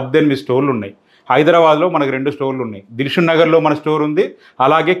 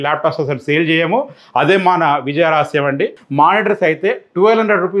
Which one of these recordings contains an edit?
second; 1 cut; at 3.2 s

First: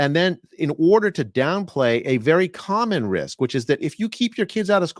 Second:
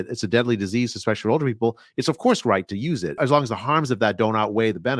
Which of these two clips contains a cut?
second; 1 cut; at 3.2 s

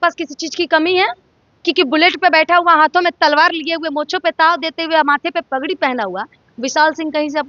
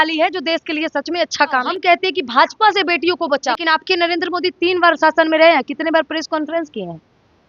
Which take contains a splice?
second; 2 cuts; at 1.7 s, 3.6 s

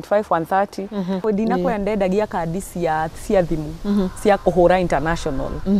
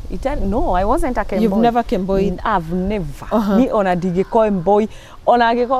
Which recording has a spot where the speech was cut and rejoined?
first; 1 cut; at 1.2 s

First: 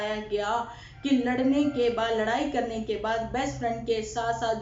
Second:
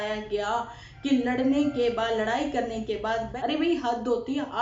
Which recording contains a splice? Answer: second; 1 cut; at 3.3 s

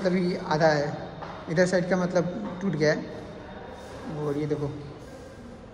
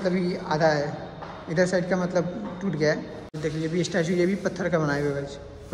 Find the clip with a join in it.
second; 1 cut; at 3.4 s

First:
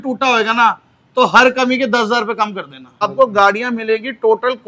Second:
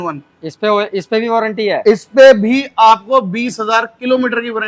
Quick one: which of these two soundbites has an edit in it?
first; 1 cut; at 3.0 s

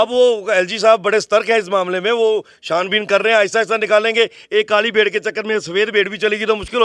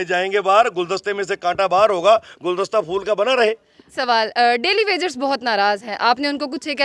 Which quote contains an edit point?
second; 1 cut; at 3.9 s

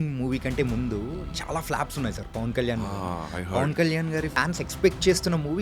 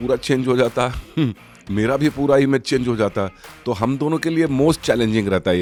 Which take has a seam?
first; 1 cut; at 4.3 s

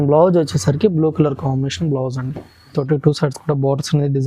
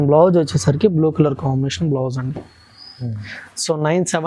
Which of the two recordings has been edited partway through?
first; 1 cut; at 2.7 s

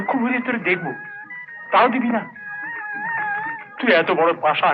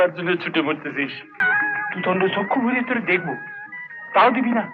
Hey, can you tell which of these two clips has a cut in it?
second; 1 cut; at 1.4 s

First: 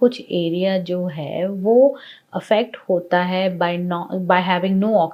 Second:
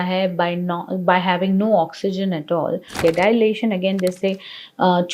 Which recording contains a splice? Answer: second; 1 cut; at 2.9 s

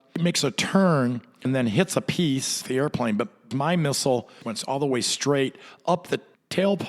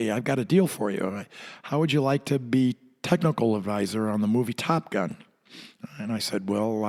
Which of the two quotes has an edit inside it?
first; 4 cuts; at 1.5 s, 2.6 s, 3.5 s, 4.5 s

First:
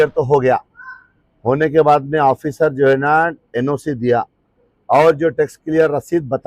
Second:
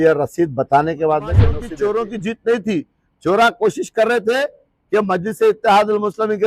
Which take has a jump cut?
second; 1 cut; at 1.6 s

